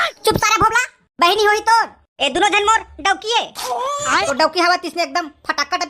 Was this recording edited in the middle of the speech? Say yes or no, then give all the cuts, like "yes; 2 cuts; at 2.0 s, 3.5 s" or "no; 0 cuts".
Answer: yes; 1 cut; at 4.3 s